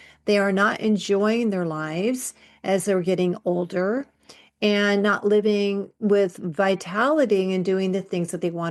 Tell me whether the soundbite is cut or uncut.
uncut